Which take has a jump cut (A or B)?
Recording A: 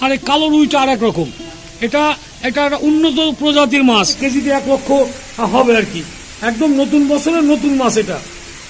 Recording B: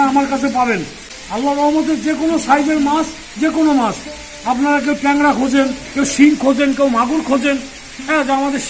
A